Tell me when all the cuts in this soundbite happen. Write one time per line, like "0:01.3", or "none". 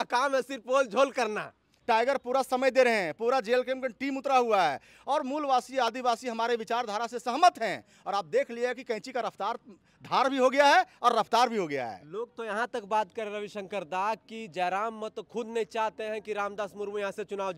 0:01.7